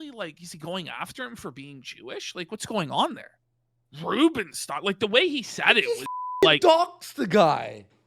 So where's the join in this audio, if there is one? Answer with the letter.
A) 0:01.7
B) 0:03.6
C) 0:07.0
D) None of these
D